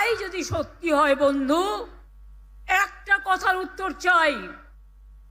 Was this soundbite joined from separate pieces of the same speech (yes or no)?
no